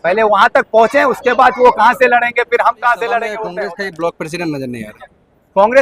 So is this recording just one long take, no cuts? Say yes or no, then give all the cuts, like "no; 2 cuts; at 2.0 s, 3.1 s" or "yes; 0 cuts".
no; 1 cut; at 3.4 s